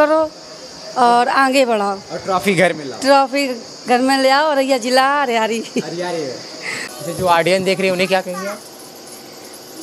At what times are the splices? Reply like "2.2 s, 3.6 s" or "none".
6.9 s